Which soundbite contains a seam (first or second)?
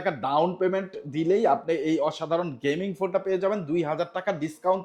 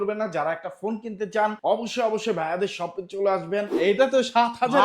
second